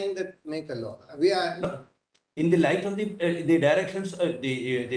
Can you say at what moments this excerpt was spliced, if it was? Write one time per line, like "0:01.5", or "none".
none